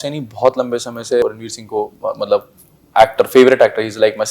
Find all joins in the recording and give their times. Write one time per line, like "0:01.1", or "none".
0:01.2